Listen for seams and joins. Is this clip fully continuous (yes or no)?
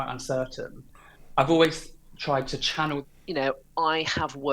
no